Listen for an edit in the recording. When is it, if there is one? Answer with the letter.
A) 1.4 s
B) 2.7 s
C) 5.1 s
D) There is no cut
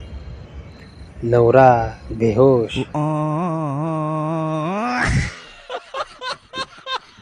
B